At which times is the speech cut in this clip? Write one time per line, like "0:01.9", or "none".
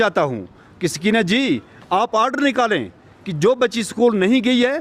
none